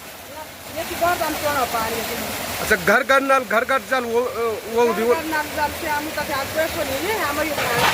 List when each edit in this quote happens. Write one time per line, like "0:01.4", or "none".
none